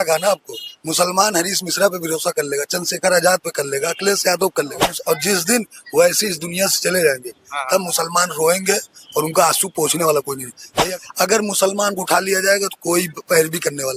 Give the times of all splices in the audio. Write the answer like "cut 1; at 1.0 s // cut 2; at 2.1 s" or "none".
cut 1; at 4.9 s // cut 2; at 10.6 s